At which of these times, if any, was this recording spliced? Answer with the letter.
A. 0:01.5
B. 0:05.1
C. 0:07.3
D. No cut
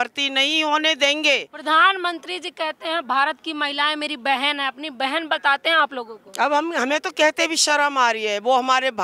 A